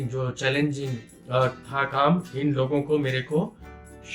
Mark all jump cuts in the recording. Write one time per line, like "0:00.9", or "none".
none